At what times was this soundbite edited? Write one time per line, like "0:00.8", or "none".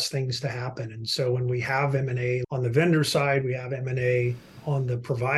0:02.4